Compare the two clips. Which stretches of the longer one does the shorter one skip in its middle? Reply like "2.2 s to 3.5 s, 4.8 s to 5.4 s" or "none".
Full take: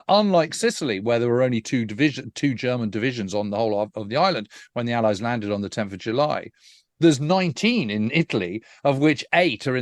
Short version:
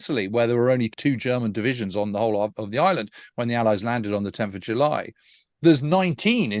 1.6 s to 2.3 s